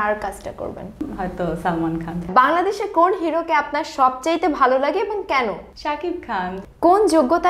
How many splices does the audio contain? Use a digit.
3